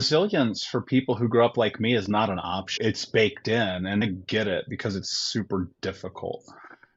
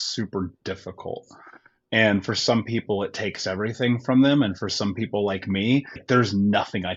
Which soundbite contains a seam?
first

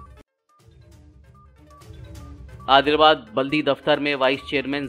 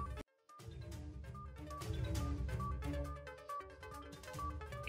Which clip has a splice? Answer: first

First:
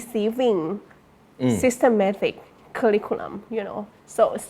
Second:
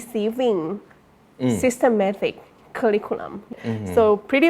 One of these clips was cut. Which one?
second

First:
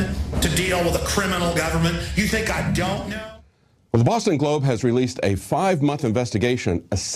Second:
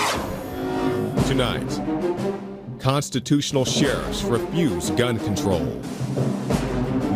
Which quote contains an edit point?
second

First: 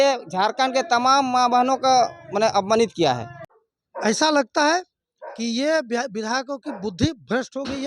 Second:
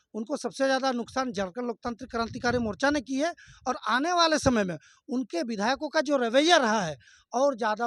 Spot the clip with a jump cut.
first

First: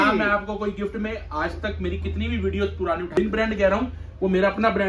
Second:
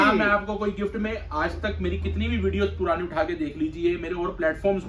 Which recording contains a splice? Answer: first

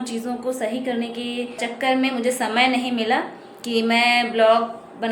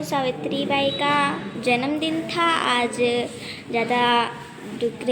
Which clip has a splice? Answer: first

